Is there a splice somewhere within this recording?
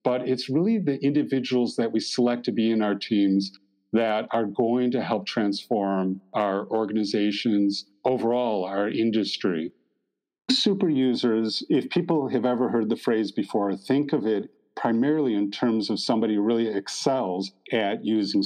yes; 4 cuts; at 6.2 s, 7.9 s, 10.0 s, 17.5 s

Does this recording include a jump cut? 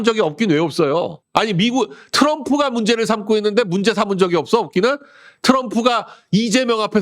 yes; 1 cut; at 1.2 s

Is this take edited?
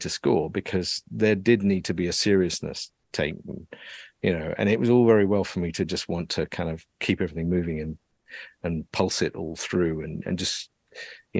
no; 0 cuts

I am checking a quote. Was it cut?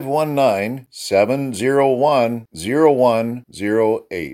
no; 0 cuts

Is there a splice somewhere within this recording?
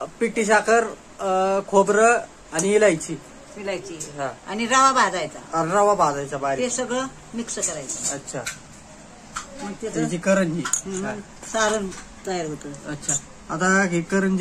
no; 0 cuts

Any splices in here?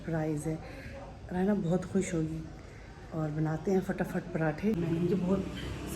yes; 1 cut; at 4.8 s

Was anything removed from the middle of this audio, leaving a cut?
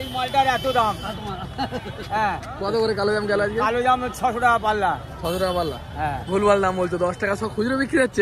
no; 0 cuts

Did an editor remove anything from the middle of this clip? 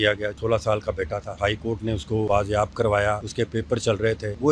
yes; 1 cut; at 2.3 s

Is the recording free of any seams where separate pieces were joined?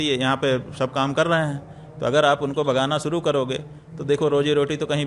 yes; 0 cuts

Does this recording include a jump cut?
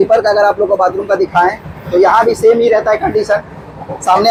no; 0 cuts

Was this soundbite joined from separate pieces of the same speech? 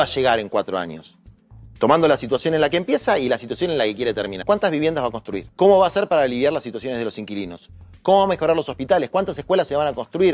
yes; 2 cuts; at 4.4 s, 5.4 s

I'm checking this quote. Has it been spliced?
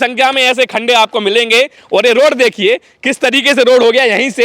no; 0 cuts

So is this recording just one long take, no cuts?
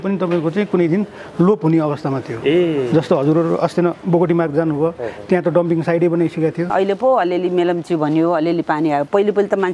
no; 1 cut; at 6.7 s

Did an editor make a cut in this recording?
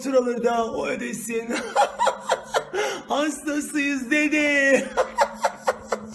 yes; 1 cut; at 4.7 s

